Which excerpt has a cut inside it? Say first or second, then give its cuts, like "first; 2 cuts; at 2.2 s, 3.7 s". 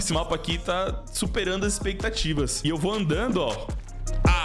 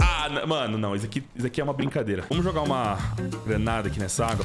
second; 1 cut; at 2.2 s